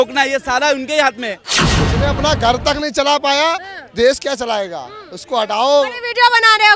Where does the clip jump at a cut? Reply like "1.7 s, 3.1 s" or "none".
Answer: 1.5 s